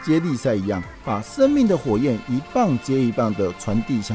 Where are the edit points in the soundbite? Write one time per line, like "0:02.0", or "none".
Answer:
none